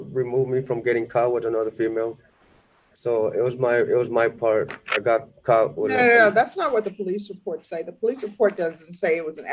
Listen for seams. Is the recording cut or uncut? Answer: uncut